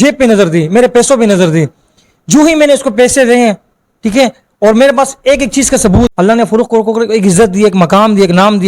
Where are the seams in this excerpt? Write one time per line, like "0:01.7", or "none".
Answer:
0:06.1